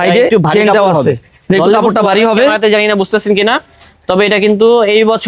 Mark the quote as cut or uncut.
uncut